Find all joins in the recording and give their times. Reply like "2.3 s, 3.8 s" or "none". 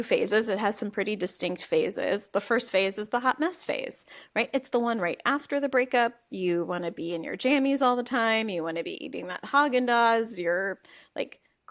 none